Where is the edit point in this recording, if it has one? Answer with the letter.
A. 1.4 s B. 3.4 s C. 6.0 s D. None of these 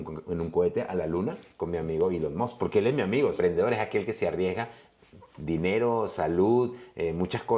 B